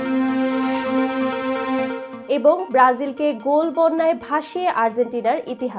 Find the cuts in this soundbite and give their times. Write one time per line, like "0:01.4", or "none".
0:02.1